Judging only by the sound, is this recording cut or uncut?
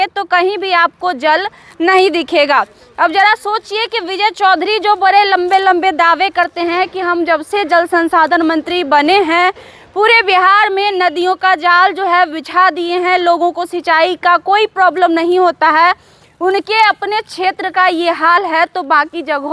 uncut